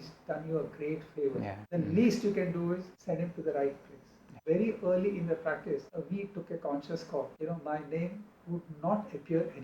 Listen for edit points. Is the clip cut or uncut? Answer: cut